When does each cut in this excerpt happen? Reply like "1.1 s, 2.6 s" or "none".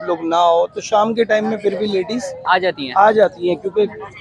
none